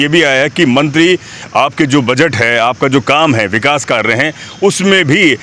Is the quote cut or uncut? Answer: uncut